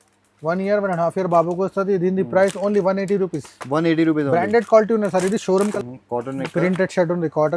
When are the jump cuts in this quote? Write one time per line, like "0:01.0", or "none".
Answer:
0:05.7